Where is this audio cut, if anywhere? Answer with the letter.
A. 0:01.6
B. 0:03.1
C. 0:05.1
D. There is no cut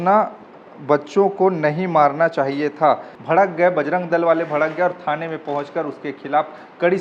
B